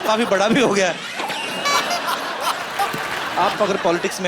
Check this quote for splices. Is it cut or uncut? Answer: cut